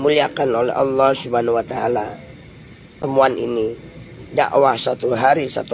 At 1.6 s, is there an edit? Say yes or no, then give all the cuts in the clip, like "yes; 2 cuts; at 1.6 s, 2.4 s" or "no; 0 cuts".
no; 1 cut; at 2.9 s